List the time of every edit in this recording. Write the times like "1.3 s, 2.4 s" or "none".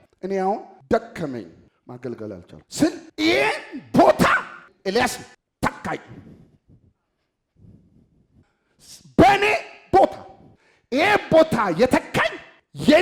none